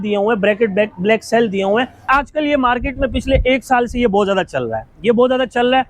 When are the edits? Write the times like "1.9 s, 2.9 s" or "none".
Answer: 2.1 s

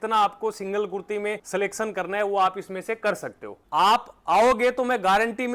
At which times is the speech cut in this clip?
3.6 s

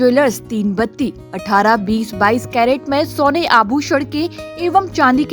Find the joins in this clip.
none

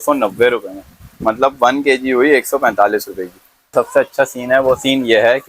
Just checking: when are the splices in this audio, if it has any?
3.7 s

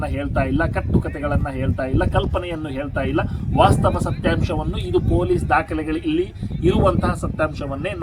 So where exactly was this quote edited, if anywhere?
none

